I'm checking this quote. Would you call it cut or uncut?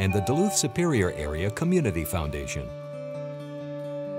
cut